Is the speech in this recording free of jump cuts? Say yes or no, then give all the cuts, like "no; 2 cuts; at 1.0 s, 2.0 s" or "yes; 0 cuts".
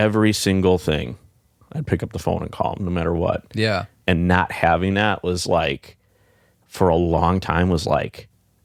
yes; 0 cuts